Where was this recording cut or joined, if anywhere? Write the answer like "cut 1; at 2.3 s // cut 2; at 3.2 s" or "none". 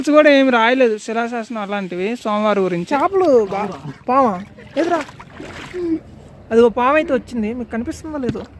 cut 1; at 2.9 s

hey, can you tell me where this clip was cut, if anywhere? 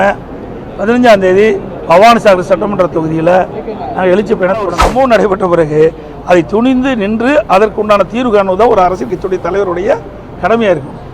cut 1; at 4.8 s

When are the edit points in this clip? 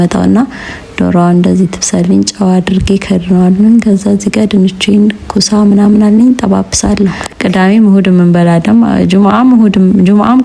cut 1; at 7.3 s

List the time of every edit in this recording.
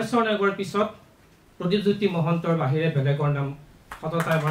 none

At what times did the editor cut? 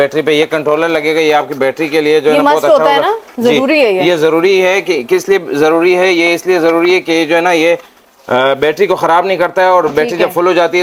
none

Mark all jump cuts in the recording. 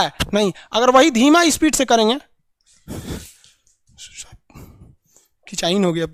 none

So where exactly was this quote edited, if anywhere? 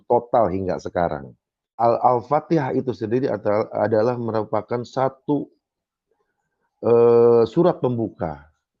cut 1; at 1.7 s

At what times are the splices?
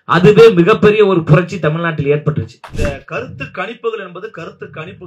cut 1; at 2.6 s

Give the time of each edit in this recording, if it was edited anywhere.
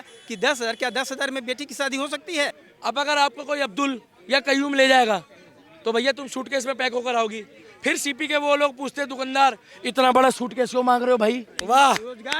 cut 1; at 2.7 s // cut 2; at 11.5 s

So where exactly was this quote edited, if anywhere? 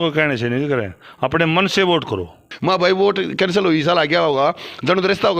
cut 1; at 2.5 s

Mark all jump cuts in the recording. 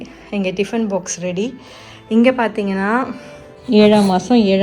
cut 1; at 3.2 s

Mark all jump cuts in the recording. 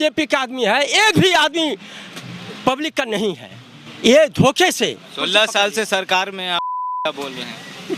none

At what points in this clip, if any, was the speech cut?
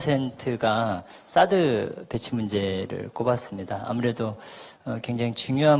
none

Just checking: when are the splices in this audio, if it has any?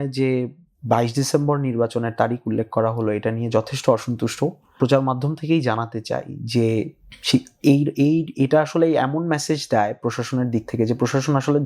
cut 1; at 4.6 s

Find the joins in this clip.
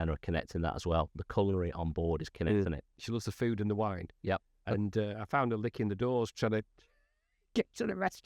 cut 1; at 2.9 s

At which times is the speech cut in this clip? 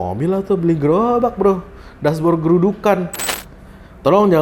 cut 1; at 3.2 s

